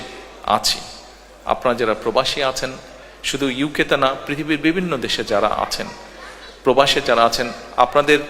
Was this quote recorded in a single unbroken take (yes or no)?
yes